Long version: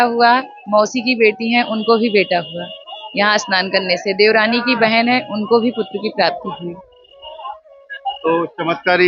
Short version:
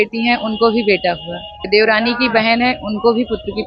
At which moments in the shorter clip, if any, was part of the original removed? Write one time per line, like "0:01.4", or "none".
0:01.6